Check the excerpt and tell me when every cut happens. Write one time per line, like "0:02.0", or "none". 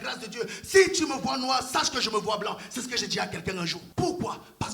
0:03.8